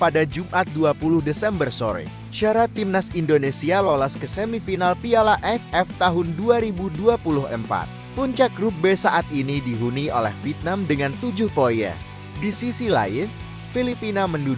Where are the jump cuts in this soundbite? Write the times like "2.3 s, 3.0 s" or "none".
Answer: 2.1 s

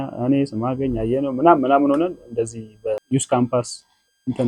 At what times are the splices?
3.0 s

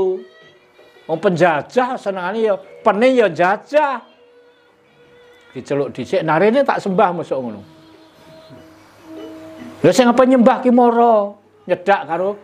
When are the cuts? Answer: 5.6 s

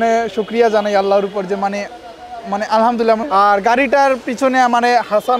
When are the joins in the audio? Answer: 3.2 s

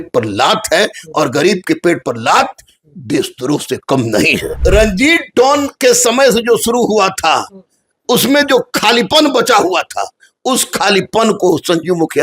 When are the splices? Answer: 4.6 s

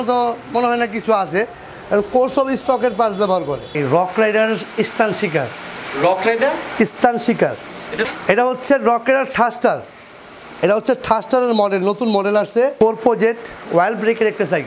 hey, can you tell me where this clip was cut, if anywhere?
3.8 s, 8.0 s, 12.7 s

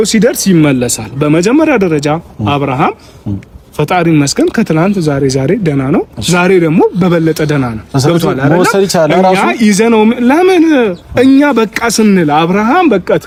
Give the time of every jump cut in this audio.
none

